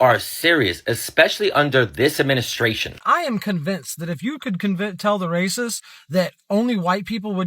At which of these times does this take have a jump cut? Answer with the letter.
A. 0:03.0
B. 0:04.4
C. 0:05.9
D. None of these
A